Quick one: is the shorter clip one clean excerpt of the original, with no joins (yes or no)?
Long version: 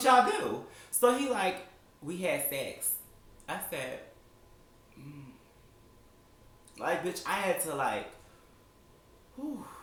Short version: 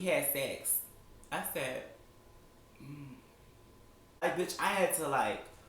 no